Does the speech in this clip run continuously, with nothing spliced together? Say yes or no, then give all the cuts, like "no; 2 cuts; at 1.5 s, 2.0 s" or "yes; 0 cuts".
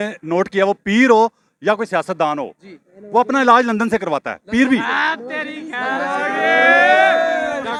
yes; 0 cuts